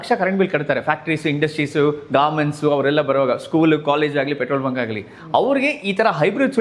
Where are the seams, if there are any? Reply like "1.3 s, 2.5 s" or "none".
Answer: none